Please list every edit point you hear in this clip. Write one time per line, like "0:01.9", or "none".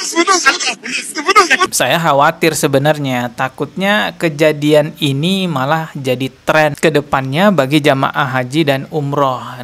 0:01.7